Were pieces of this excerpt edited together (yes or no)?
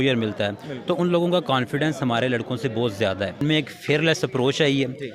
yes